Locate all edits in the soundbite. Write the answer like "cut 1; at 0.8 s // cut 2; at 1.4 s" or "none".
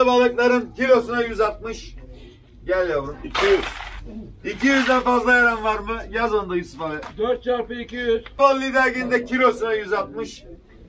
cut 1; at 8.4 s